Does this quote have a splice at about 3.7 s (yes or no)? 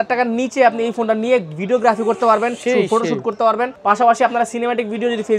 yes